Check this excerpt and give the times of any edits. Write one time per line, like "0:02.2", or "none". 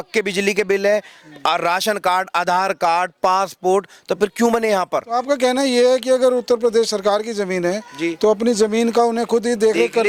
none